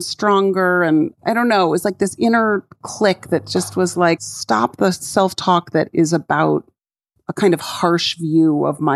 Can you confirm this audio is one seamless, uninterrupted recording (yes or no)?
no